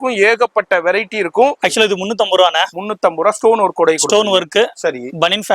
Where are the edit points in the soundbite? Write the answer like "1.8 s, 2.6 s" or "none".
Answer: 1.6 s